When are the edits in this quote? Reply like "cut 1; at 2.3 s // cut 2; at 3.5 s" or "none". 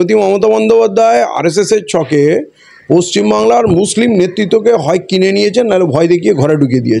none